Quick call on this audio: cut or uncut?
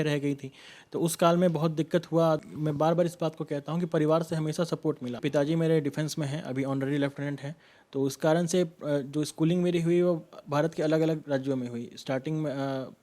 cut